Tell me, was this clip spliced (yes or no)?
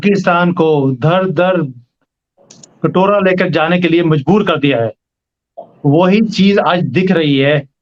no